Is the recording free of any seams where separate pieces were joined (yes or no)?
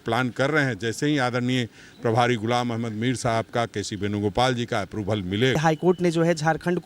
no